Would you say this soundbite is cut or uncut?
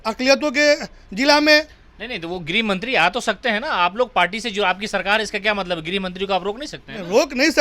uncut